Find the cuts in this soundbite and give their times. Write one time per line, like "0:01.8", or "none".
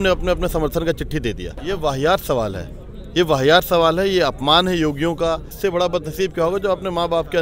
0:01.6
0:05.5